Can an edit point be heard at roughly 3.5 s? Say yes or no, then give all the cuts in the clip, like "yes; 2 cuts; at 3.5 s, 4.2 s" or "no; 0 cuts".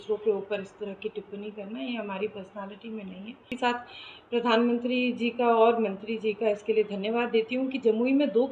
yes; 1 cut; at 3.5 s